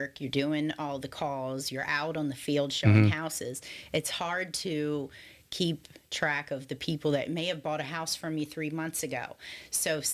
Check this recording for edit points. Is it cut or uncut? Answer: uncut